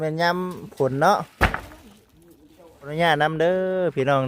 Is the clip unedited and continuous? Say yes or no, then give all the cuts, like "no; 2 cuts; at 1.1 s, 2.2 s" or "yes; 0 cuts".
no; 1 cut; at 2.9 s